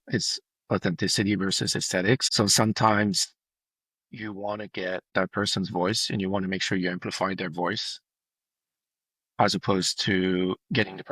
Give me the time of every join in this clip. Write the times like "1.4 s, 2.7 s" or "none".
2.3 s, 5.1 s